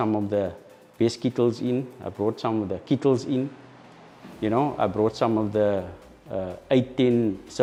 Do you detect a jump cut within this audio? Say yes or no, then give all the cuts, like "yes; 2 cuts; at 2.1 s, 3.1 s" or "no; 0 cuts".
no; 0 cuts